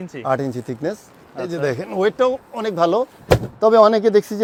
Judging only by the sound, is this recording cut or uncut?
uncut